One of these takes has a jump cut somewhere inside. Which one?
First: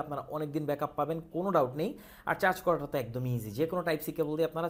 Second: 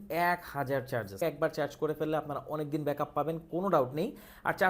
second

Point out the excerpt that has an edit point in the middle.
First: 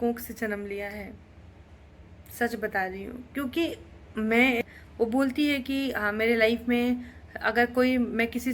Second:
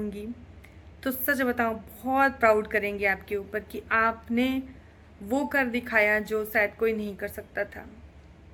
first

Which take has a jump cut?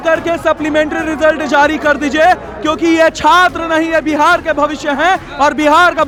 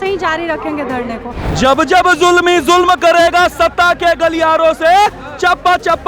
second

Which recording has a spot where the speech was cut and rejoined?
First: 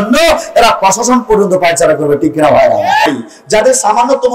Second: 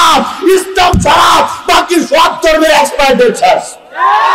first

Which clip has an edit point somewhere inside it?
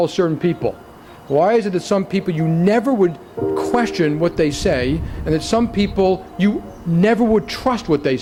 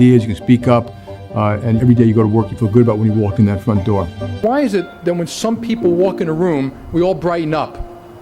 second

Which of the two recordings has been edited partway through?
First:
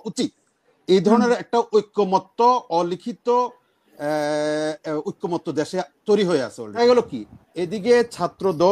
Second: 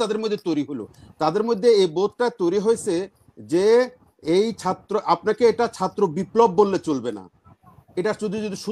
first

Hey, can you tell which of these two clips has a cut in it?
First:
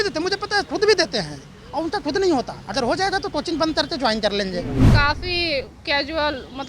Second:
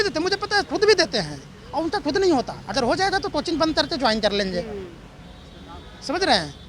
first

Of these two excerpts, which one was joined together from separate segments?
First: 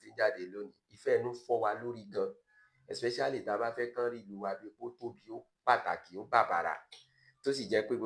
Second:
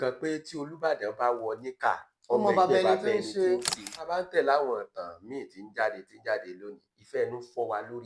second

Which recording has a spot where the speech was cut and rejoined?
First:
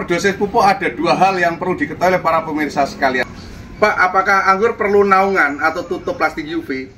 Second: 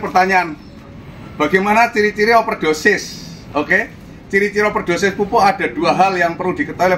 first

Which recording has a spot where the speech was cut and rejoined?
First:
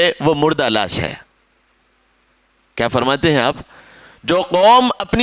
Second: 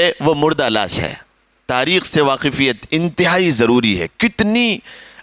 second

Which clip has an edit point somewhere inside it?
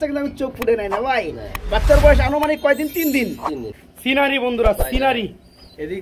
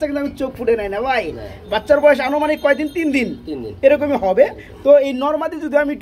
first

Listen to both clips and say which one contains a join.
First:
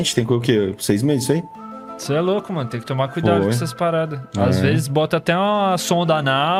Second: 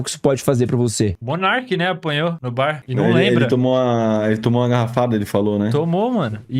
second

